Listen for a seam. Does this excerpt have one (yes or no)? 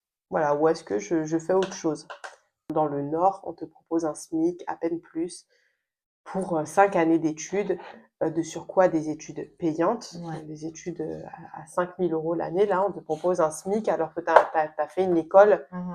yes